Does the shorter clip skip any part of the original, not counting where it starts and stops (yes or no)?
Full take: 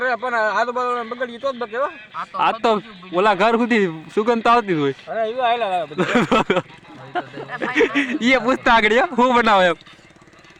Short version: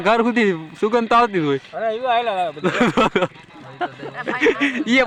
no